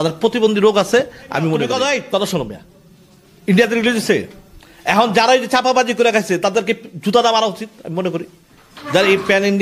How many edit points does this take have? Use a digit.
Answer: 1